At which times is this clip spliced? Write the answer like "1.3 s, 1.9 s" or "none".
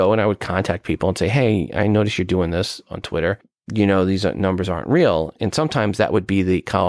3.5 s, 5.3 s